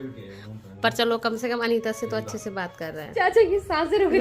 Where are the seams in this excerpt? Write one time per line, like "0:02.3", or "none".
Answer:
0:03.0